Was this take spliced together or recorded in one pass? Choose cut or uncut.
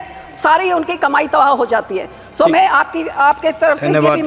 uncut